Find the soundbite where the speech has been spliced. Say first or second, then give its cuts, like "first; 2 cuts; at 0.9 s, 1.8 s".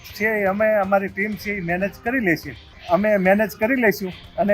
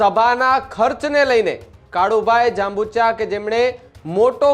first; 1 cut; at 2.7 s